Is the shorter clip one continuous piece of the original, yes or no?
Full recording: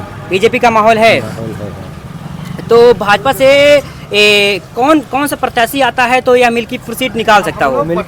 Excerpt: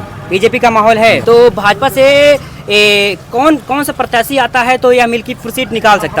no